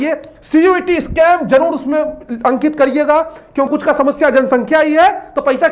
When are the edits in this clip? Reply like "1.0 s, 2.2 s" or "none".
3.7 s

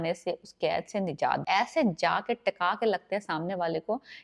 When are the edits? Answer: 1.4 s

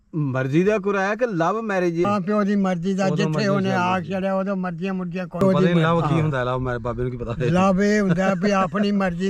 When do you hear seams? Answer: none

